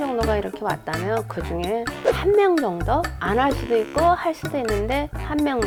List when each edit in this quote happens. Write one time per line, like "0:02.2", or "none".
none